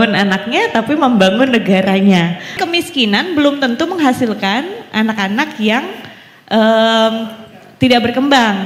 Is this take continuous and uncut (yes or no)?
no